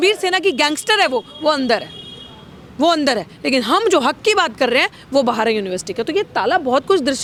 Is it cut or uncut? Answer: uncut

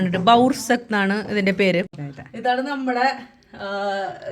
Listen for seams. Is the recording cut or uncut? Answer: cut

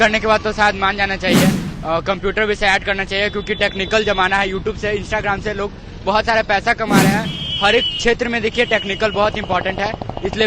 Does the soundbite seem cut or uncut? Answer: cut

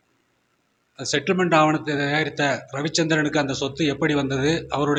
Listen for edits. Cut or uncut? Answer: uncut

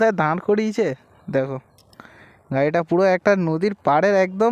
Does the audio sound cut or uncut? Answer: uncut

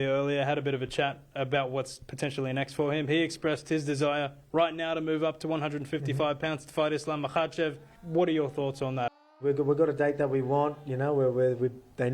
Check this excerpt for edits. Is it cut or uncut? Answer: cut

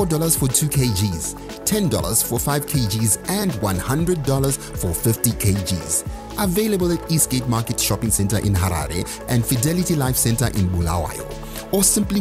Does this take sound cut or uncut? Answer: uncut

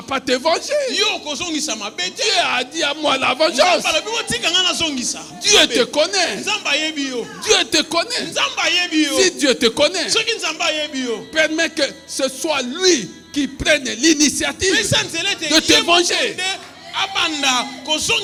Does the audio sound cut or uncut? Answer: uncut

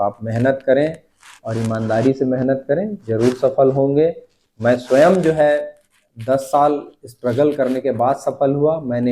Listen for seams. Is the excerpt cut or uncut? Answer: uncut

